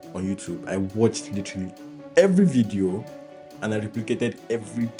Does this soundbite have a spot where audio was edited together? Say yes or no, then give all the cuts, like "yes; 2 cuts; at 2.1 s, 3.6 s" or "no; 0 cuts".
no; 0 cuts